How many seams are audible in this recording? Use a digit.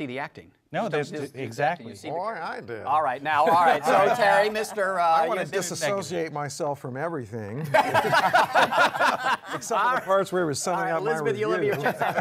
0